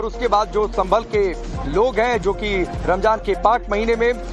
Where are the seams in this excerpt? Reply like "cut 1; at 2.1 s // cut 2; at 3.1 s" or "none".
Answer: cut 1; at 2.7 s